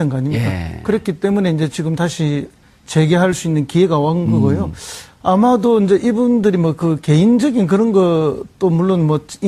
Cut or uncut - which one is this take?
uncut